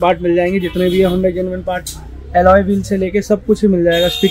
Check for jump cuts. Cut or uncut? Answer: uncut